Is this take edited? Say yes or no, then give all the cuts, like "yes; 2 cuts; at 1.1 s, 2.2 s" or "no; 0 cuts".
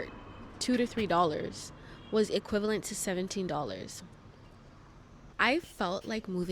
yes; 1 cut; at 5.2 s